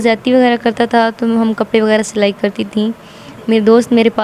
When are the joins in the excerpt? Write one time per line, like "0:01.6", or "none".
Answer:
none